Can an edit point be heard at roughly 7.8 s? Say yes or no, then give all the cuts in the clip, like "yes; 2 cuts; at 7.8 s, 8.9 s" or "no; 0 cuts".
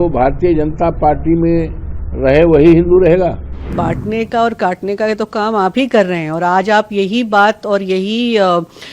no; 1 cut; at 3.7 s